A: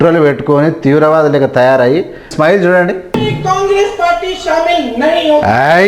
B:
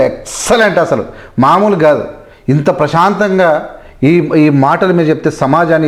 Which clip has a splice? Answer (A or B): A